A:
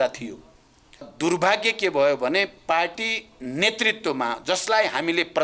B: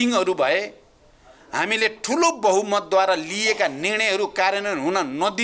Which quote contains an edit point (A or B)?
A